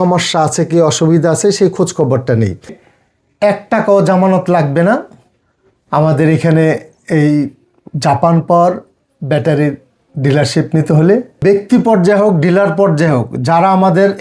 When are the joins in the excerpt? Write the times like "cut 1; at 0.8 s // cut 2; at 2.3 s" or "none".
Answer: cut 1; at 2.8 s // cut 2; at 11.3 s